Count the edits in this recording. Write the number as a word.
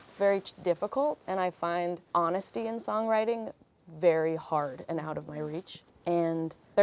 one